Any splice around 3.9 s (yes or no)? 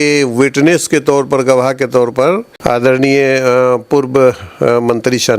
no